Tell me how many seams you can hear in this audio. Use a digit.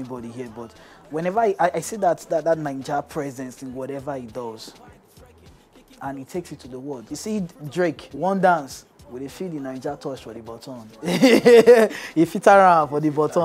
2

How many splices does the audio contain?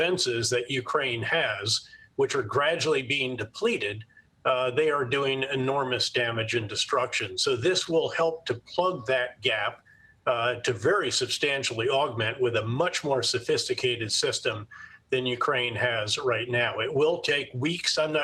0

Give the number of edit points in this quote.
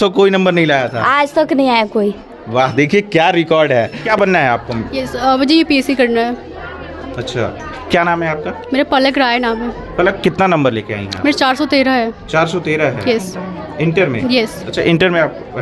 0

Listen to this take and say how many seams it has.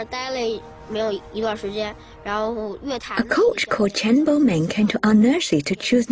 1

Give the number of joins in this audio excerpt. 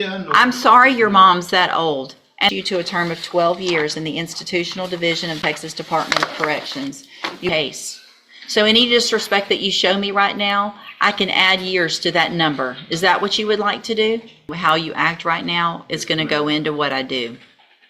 3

